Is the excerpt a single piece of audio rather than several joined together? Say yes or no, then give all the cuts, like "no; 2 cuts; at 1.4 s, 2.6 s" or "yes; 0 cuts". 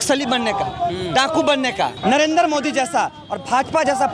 no; 1 cut; at 2.0 s